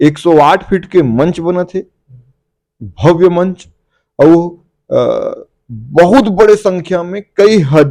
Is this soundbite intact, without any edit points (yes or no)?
yes